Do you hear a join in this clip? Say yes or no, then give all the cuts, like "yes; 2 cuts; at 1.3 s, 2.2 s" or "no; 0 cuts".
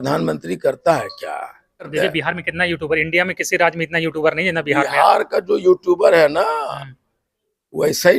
yes; 1 cut; at 1.9 s